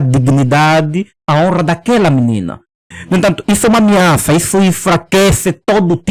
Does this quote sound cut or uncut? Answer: uncut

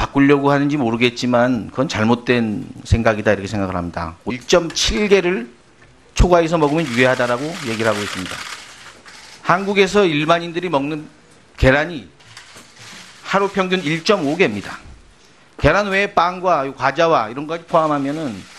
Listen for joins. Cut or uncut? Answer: uncut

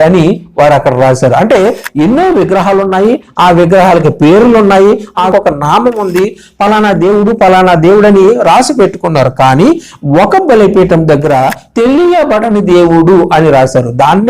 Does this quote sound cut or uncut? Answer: cut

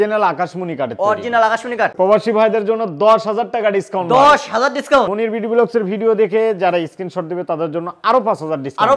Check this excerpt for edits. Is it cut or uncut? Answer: cut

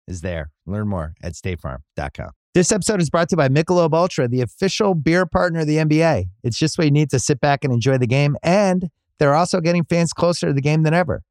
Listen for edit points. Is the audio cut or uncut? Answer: cut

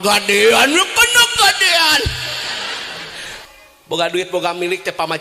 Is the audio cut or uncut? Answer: cut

